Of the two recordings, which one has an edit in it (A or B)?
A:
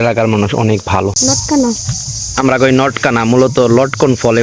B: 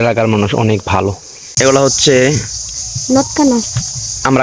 A